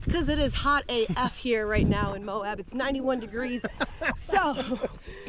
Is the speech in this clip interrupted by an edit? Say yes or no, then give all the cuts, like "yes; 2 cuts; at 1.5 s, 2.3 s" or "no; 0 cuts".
no; 0 cuts